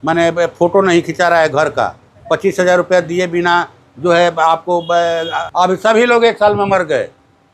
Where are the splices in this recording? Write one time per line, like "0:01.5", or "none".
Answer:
0:05.4